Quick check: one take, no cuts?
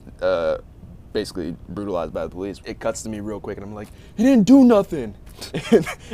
no; 1 cut; at 2.6 s

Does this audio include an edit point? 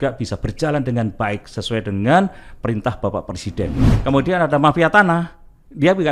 yes; 1 cut; at 3.9 s

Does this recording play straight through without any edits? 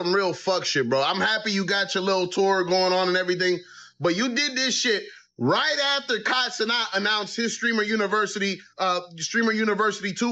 yes; 0 cuts

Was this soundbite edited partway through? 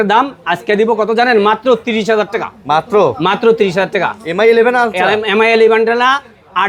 no; 0 cuts

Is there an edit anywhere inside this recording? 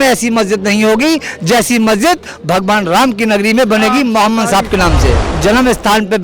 yes; 1 cut; at 5.2 s

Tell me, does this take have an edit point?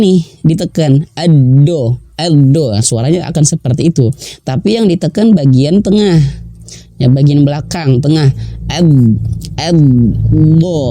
no; 0 cuts

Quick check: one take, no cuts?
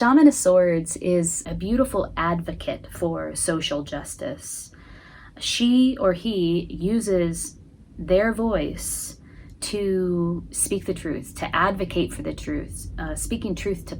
no; 1 cut; at 1.4 s

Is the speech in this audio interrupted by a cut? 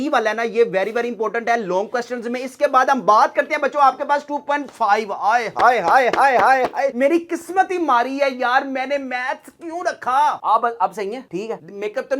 yes; 1 cut; at 10.4 s

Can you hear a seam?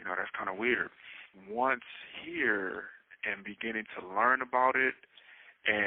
yes; 1 cut; at 1.3 s

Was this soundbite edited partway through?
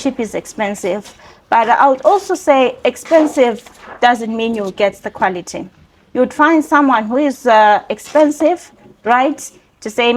no; 0 cuts

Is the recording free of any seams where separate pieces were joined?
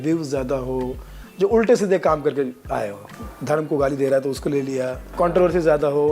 no; 2 cuts; at 3.2 s, 5.1 s

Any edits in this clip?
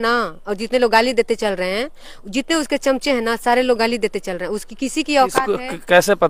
no; 0 cuts

